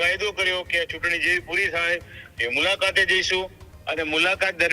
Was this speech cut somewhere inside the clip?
no; 0 cuts

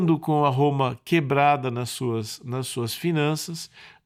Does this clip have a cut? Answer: no; 0 cuts

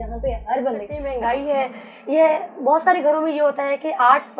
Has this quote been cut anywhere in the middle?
yes; 1 cut; at 1.0 s

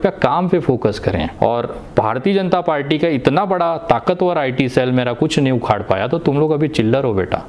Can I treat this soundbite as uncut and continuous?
no; 1 cut; at 1.3 s

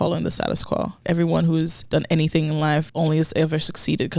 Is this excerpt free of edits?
no; 3 cuts; at 1.0 s, 1.8 s, 2.9 s

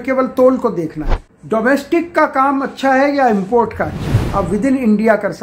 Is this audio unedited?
no; 2 cuts; at 1.3 s, 4.2 s

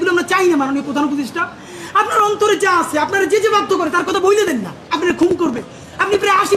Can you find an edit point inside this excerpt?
yes; 1 cut; at 4.8 s

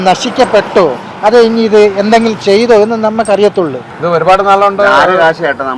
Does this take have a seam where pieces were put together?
yes; 1 cut; at 3.9 s

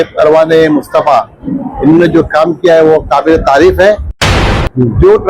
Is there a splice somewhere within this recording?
yes; 1 cut; at 4.4 s

